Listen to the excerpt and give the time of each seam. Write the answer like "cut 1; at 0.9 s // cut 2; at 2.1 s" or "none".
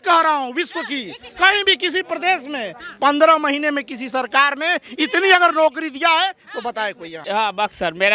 cut 1; at 7.1 s